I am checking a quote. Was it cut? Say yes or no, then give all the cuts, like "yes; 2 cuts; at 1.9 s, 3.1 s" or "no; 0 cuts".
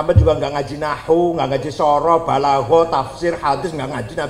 no; 0 cuts